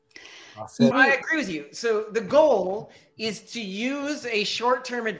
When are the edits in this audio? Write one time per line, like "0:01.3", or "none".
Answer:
0:00.9